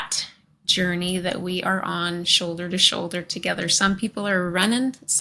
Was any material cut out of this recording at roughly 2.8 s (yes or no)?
no